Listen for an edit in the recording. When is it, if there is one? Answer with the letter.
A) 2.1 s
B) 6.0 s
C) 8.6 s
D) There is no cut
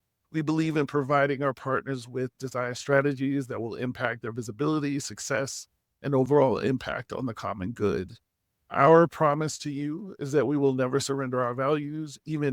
D